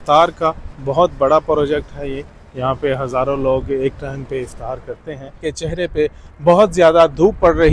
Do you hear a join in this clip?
yes; 1 cut; at 5.4 s

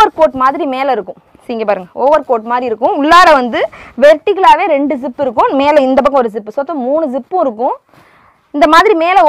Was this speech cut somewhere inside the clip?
no; 0 cuts

